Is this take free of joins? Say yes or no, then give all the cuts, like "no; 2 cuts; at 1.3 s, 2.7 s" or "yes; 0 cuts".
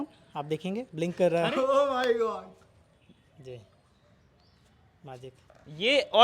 no; 1 cut; at 1.5 s